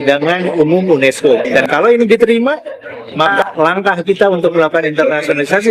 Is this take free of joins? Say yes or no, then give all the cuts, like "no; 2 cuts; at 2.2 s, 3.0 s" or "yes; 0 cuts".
no; 2 cuts; at 1.5 s, 3.4 s